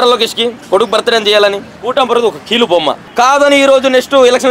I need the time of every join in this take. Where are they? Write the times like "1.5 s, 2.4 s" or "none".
1.7 s, 3.0 s